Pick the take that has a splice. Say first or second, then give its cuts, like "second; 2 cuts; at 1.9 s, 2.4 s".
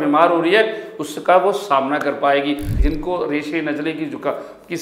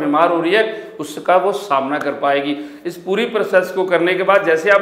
first; 1 cut; at 2.7 s